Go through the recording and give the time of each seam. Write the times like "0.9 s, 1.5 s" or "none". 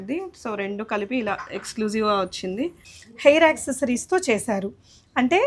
2.9 s